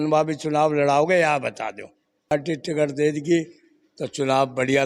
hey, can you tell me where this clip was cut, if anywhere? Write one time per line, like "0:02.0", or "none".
0:02.3

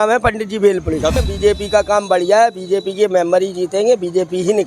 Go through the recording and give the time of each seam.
0:01.2

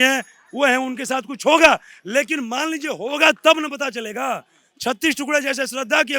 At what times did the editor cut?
none

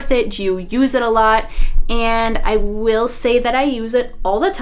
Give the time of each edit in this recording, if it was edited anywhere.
none

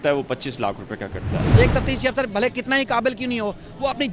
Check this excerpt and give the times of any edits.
0:01.3

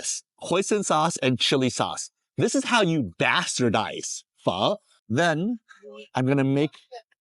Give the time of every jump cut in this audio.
0:04.9

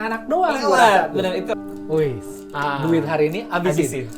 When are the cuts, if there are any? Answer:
0:01.6

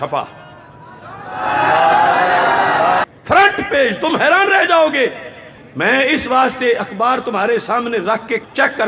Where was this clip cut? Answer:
0:03.1

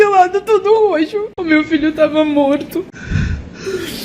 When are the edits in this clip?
0:01.3
0:03.0

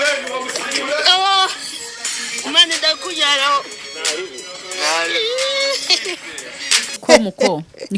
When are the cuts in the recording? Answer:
0:07.0

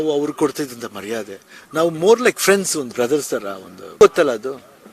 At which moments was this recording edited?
0:04.0

